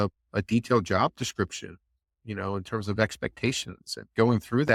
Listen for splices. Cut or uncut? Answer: uncut